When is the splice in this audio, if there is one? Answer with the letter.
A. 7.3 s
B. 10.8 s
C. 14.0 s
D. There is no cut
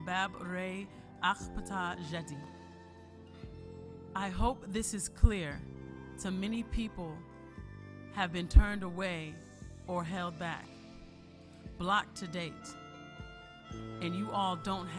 C